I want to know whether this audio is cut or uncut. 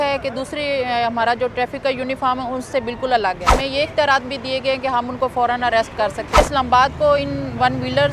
cut